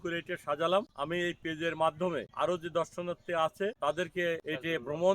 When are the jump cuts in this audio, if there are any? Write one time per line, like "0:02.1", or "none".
0:00.9
0:02.3
0:04.1